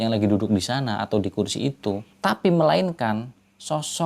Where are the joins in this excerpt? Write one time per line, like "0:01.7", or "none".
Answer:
0:02.1